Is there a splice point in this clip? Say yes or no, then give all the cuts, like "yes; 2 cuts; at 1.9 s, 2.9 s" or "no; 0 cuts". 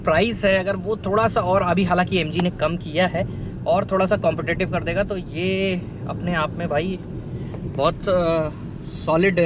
no; 0 cuts